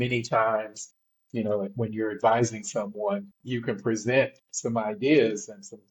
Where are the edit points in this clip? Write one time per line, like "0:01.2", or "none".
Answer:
0:03.4